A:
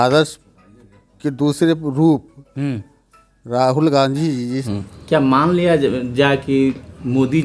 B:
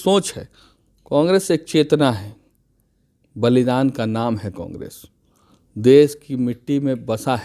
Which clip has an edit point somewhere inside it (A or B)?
A